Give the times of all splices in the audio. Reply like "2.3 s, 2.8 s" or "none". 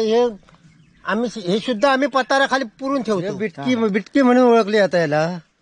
3.5 s